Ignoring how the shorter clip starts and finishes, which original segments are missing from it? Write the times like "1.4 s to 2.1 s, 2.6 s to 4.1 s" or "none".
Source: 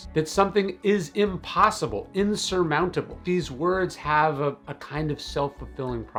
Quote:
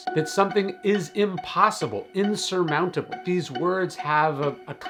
none